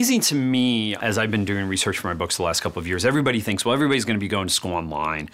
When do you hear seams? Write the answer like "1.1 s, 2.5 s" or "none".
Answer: 1.0 s